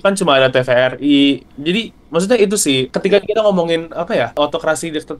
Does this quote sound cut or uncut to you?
cut